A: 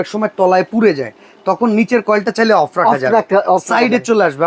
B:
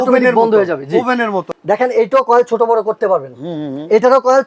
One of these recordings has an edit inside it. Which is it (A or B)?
B